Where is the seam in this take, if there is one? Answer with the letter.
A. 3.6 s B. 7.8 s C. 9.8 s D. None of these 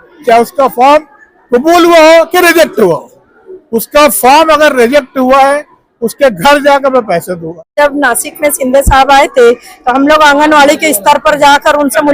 B